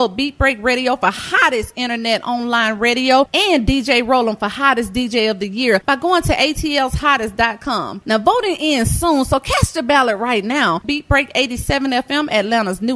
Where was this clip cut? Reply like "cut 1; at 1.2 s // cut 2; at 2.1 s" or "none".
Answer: none